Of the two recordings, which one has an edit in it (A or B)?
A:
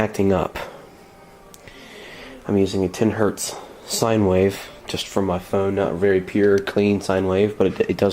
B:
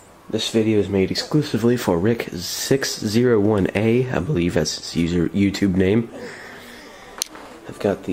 A